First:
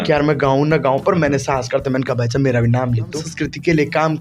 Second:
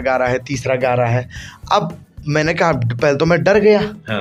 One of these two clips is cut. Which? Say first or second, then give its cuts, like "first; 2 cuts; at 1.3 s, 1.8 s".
first; 1 cut; at 3.2 s